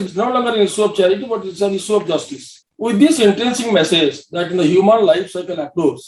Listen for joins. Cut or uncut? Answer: uncut